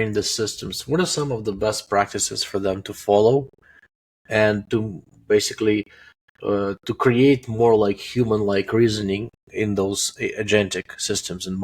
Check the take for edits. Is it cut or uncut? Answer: uncut